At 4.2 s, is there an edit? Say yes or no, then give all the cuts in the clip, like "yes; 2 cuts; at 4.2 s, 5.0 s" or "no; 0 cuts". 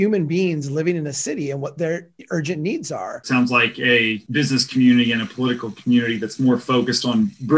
yes; 2 cuts; at 3.2 s, 4.2 s